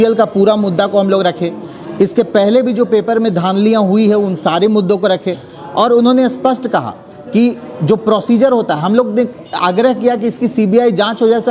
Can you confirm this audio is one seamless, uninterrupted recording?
yes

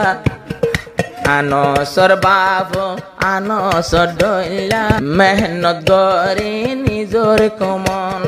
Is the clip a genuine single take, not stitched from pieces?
no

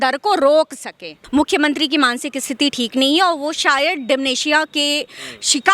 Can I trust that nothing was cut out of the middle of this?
no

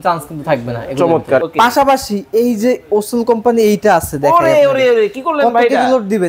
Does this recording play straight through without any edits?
no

